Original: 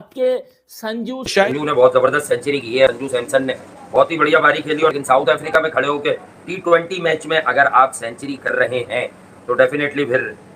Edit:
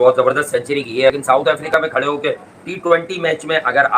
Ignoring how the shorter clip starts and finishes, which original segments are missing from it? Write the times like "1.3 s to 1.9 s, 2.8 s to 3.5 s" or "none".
3.0 s to 5.0 s